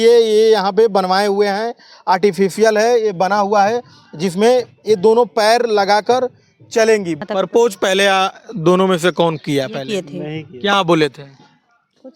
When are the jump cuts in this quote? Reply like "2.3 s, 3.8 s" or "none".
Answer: 7.2 s

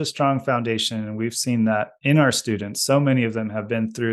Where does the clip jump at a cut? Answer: none

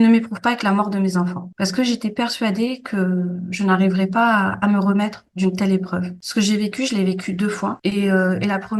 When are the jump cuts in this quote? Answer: 6.2 s

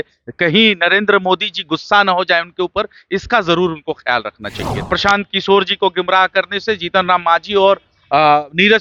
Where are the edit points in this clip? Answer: 4.7 s

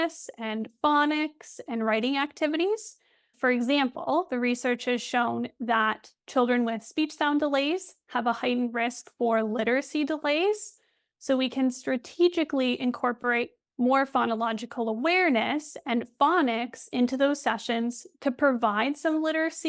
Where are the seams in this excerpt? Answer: none

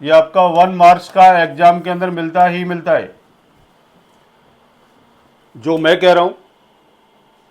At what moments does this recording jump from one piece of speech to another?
5.3 s

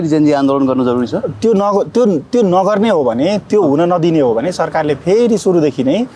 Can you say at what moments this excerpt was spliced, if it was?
none

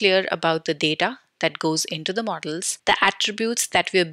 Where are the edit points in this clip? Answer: 2.7 s

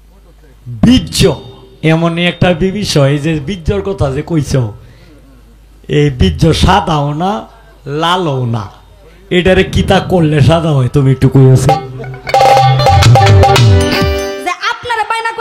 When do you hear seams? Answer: 14.2 s

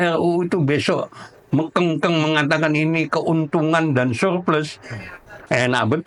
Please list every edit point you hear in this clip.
none

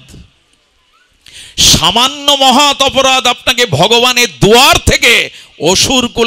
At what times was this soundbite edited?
none

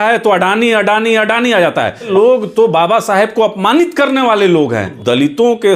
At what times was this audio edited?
2.1 s, 5.0 s

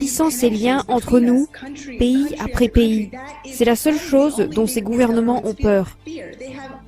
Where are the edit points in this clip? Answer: 6.0 s

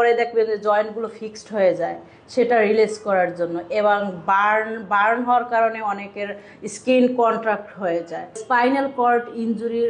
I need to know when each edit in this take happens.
8.4 s

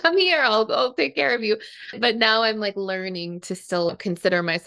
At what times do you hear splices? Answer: 1.9 s, 3.9 s

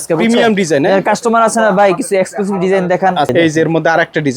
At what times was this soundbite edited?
3.3 s

